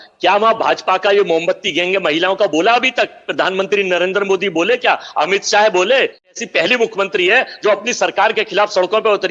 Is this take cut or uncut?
cut